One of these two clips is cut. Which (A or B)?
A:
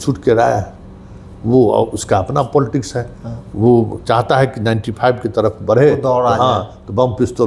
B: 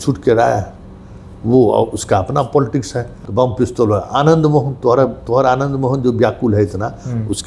B